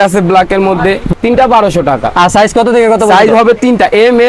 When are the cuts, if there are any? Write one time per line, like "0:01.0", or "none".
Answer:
0:01.1